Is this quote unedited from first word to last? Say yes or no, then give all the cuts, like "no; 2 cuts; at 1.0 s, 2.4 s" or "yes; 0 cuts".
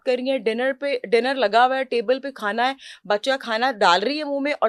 yes; 0 cuts